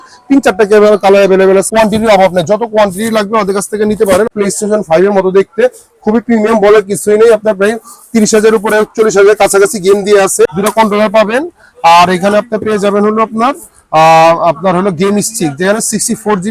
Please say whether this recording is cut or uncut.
cut